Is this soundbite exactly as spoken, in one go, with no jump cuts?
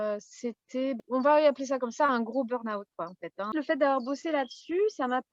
no; 2 cuts; at 1.0 s, 3.5 s

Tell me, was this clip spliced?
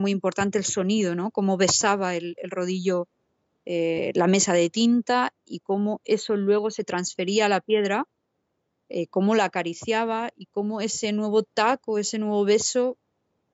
no; 0 cuts

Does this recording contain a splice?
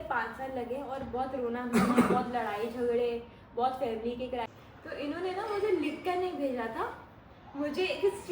yes; 1 cut; at 4.5 s

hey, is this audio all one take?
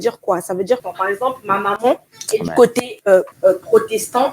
no; 3 cuts; at 0.8 s, 2.1 s, 3.3 s

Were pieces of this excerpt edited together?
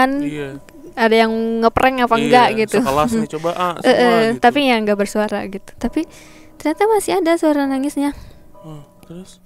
no; 0 cuts

